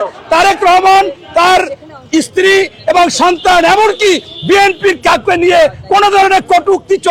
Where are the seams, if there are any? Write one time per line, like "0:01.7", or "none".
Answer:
none